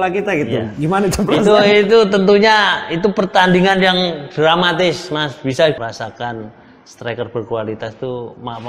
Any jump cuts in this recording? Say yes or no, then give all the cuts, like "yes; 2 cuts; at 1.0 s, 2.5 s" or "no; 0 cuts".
yes; 1 cut; at 5.8 s